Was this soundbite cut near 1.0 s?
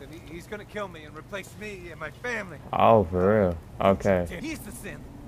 no; 3 cuts; at 2.6 s, 3.7 s, 4.4 s

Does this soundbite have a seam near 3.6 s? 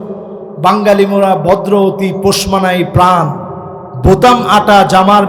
no; 0 cuts

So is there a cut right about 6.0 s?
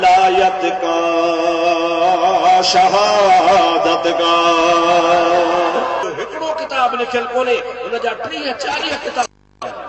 yes; 1 cut; at 6.0 s

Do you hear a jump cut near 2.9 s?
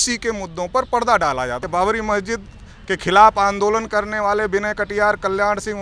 no; 1 cut; at 1.6 s

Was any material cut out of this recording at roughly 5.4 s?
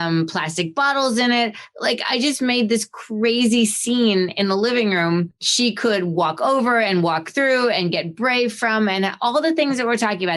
yes; 1 cut; at 5.4 s

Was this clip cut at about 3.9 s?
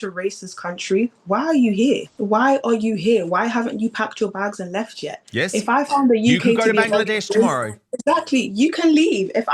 no; 1 cut; at 2.1 s

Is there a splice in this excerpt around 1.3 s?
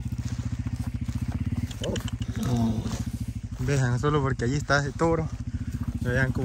no; 0 cuts

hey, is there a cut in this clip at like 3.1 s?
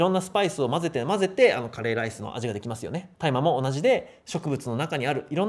yes; 1 cut; at 3.1 s

